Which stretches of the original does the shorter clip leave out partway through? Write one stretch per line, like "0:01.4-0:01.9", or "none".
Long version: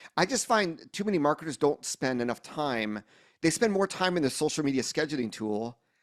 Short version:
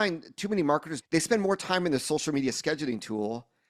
0:01.5-0:03.2